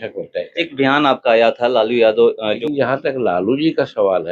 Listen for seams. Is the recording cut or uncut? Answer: cut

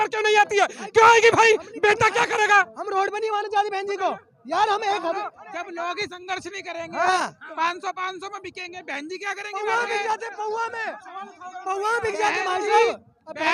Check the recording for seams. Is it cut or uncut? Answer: uncut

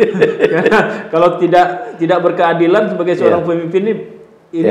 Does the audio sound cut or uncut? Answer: uncut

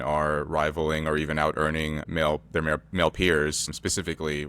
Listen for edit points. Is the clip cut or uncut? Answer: cut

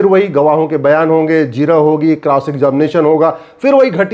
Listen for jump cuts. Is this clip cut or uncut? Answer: uncut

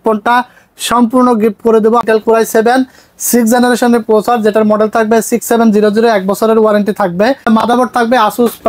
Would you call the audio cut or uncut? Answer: cut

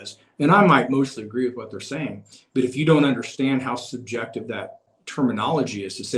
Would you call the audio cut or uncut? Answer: cut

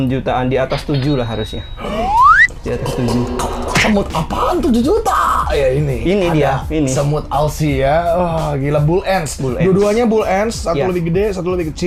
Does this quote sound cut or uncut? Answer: uncut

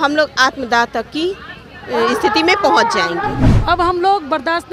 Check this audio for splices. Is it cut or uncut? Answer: cut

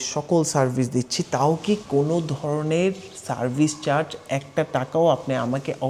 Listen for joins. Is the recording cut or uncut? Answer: uncut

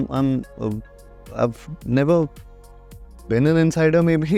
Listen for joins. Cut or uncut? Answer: uncut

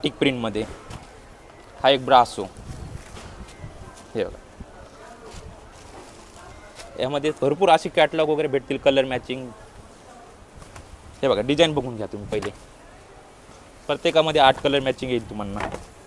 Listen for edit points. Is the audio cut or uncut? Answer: uncut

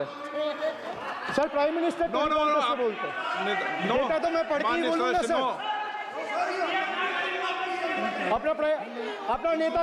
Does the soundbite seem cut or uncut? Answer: uncut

